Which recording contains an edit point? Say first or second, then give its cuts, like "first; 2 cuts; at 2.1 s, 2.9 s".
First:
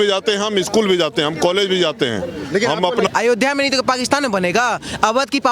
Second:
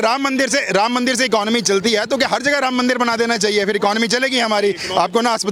first; 1 cut; at 3.1 s